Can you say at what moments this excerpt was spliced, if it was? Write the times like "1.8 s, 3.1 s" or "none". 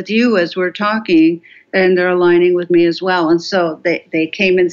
1.6 s